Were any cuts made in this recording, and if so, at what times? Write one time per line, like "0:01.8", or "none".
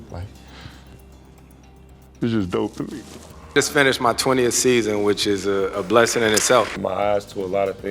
0:03.5
0:06.7